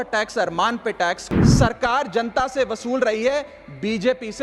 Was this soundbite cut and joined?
yes; 1 cut; at 1.3 s

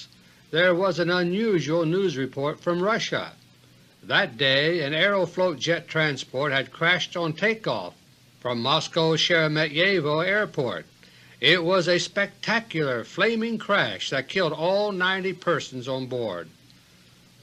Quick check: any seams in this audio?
no; 0 cuts

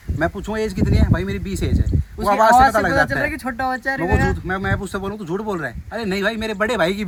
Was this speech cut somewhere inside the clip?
no; 0 cuts

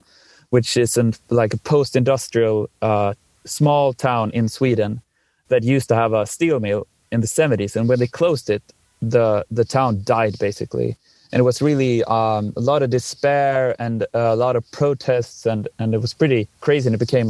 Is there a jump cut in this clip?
no; 0 cuts

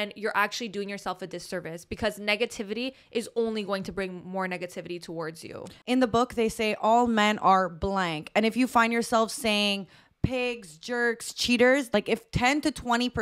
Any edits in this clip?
yes; 2 cuts; at 5.8 s, 11.9 s

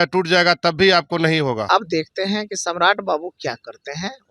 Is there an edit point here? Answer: yes; 1 cut; at 1.6 s

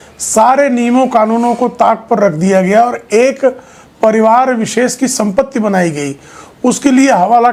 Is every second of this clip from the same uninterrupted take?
yes; 0 cuts

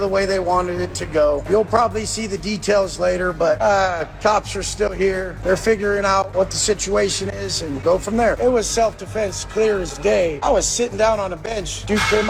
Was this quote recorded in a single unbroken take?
yes; 0 cuts

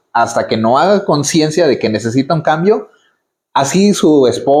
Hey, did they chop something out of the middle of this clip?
no; 0 cuts

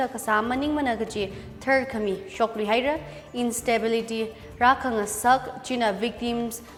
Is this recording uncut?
yes; 0 cuts

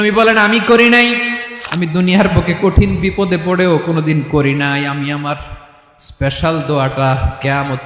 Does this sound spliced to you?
yes; 1 cut; at 1.4 s

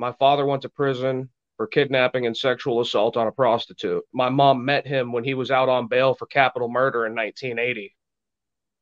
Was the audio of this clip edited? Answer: yes; 1 cut; at 4.1 s

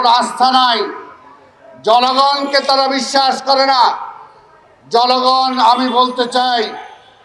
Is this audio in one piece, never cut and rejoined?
yes; 0 cuts

